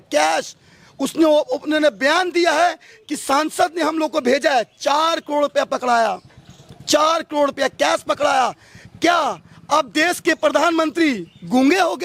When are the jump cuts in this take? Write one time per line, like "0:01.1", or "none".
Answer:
none